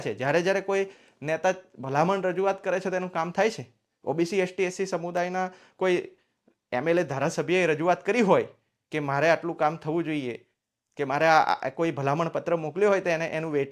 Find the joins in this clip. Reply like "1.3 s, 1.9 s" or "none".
none